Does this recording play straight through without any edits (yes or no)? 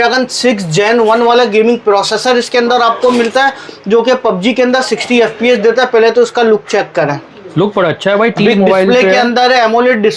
yes